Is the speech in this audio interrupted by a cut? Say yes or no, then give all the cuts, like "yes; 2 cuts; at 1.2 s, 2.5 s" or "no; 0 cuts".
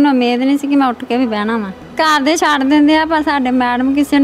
yes; 1 cut; at 1.8 s